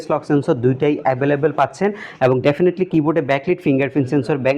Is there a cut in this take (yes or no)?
no